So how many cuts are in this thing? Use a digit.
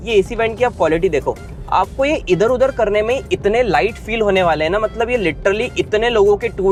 0